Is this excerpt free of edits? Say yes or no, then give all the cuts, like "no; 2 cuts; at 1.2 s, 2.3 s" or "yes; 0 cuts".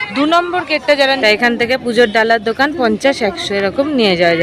no; 1 cut; at 1.2 s